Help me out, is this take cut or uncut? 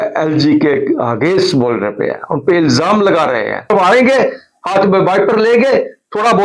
cut